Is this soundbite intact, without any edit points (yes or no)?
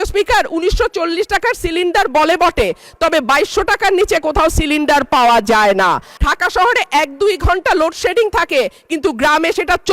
no